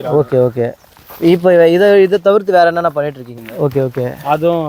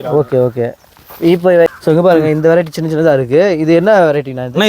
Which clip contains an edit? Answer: second; 1 cut; at 1.7 s

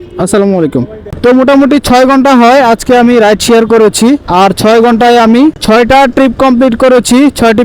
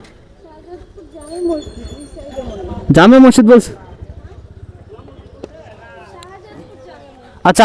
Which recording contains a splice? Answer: first; 1 cut; at 1.2 s

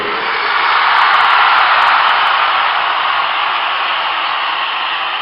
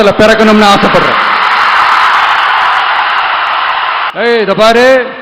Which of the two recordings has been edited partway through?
second; 1 cut; at 4.0 s

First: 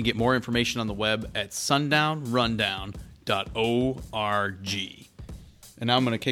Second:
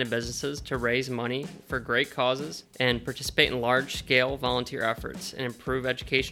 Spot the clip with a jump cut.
second; 1 cut; at 2.6 s

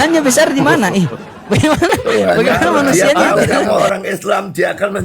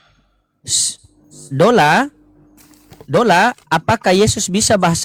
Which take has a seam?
first; 1 cut; at 3.9 s

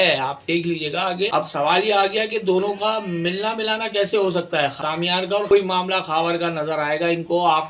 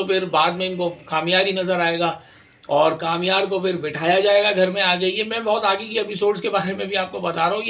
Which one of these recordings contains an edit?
first; 2 cuts; at 1.3 s, 5.0 s

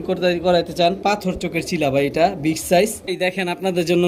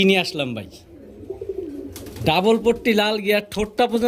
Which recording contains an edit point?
first; 1 cut; at 3.1 s

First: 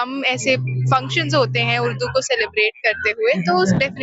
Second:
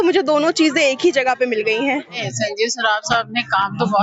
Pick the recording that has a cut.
second; 1 cut; at 2.2 s

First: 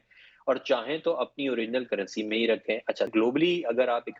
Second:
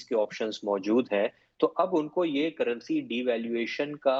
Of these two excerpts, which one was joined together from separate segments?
first; 1 cut; at 3.1 s

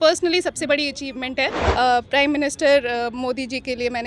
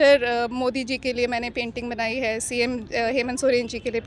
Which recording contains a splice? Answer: first; 1 cut; at 1.6 s

